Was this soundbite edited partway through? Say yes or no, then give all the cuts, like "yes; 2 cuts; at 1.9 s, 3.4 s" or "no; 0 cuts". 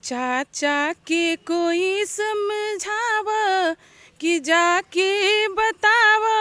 no; 0 cuts